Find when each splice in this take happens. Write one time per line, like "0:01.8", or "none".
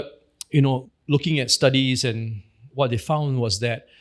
0:00.9